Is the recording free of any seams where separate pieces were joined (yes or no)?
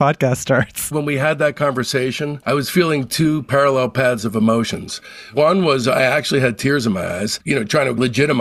no